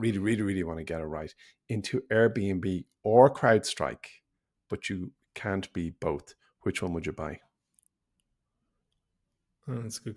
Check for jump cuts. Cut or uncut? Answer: uncut